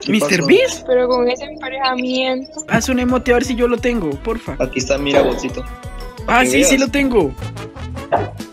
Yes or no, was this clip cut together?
yes